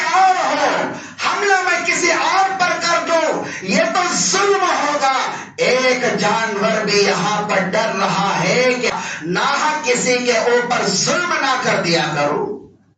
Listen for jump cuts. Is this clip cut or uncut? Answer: cut